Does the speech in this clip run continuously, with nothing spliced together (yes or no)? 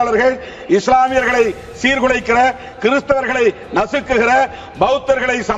yes